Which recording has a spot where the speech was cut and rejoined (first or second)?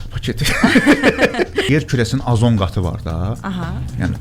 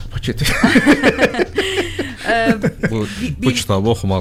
first